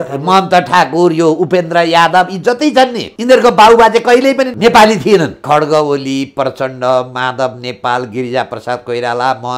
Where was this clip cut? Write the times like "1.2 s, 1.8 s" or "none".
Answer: 3.1 s, 4.5 s, 5.4 s